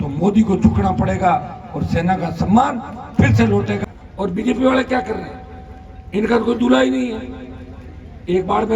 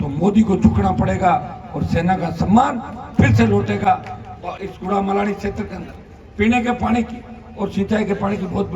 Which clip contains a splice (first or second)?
first